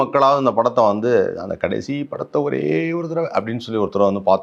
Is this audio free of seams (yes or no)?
yes